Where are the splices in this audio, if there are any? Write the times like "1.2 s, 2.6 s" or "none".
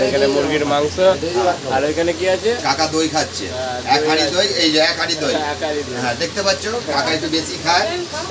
none